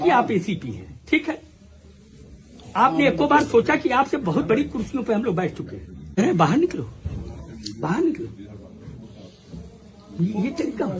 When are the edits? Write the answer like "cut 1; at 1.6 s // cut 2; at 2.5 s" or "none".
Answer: cut 1; at 6.2 s